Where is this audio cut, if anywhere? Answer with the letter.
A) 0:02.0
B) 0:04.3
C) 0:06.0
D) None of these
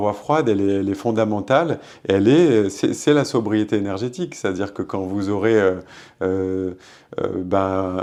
D